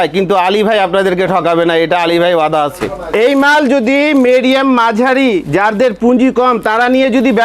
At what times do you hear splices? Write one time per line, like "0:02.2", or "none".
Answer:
0:03.1